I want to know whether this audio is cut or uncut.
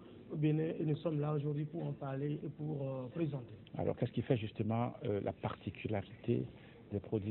uncut